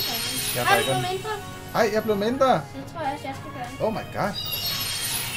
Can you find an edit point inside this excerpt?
no; 0 cuts

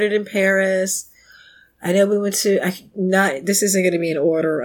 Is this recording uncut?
yes; 0 cuts

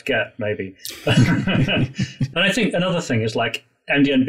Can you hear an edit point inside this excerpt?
yes; 1 cut; at 2.2 s

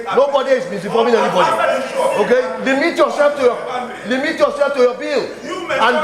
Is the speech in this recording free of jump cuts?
yes; 0 cuts

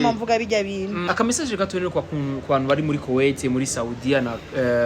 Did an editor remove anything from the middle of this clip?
yes; 1 cut; at 1.0 s

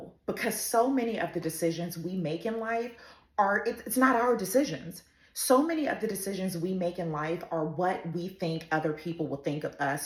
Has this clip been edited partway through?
no; 0 cuts

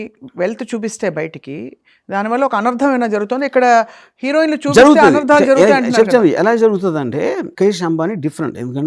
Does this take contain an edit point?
no; 0 cuts

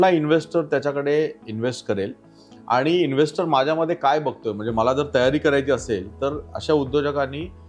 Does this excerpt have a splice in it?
no; 0 cuts

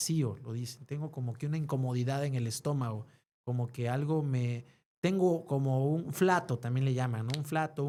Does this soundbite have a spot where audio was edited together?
no; 0 cuts

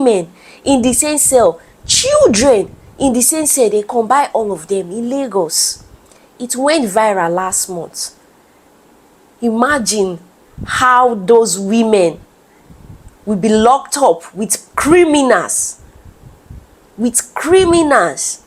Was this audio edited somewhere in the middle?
no; 0 cuts

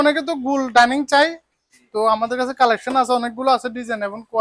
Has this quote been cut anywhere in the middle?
no; 0 cuts

